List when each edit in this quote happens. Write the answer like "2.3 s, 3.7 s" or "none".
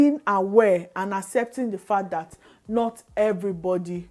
none